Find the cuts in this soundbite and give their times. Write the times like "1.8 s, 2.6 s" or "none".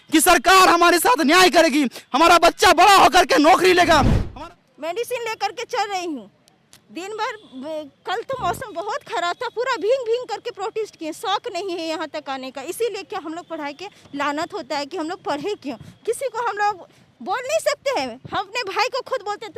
4.2 s